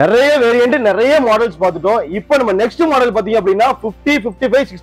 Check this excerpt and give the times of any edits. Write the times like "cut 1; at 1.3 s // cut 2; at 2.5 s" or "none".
none